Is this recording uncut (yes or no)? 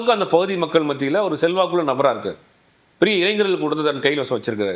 yes